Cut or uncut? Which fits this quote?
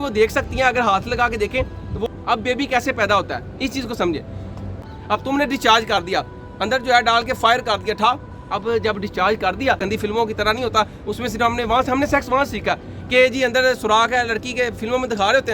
cut